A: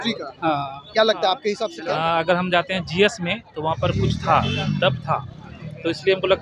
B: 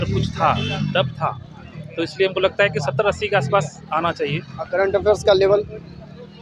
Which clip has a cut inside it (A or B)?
A